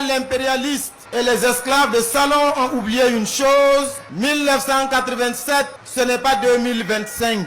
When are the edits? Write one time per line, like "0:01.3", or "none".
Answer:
0:01.0
0:04.0
0:05.8